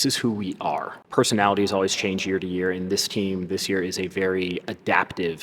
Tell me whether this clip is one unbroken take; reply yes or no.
no